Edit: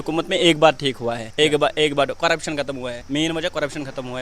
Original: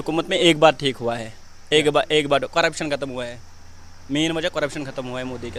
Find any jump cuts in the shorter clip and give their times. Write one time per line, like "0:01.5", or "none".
0:01.2
0:03.0